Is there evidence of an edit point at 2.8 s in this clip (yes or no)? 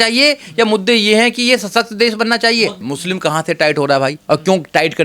yes